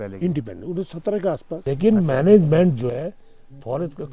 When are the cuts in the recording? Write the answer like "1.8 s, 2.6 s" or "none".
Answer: 1.6 s